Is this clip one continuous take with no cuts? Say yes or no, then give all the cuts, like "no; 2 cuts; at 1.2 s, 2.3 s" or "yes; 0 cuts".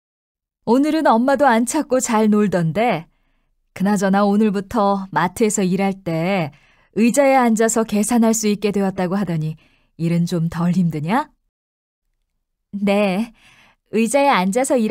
yes; 0 cuts